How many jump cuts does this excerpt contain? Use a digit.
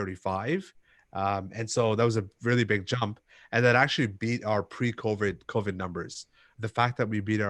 1